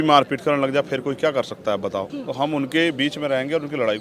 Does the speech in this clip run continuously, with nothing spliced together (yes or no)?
no